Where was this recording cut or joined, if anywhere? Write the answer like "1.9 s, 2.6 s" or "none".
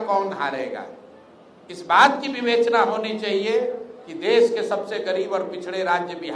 none